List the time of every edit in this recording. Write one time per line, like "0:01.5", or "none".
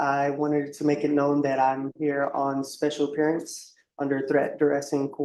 none